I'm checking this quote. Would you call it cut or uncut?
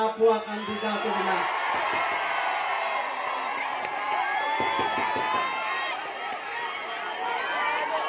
uncut